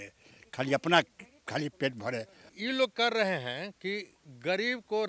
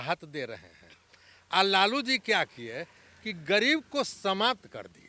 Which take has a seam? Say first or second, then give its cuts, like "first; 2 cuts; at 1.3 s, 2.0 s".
first; 1 cut; at 2.5 s